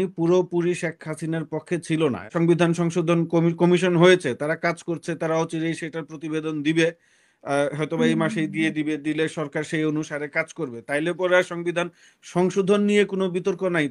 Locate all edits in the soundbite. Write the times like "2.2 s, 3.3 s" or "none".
2.3 s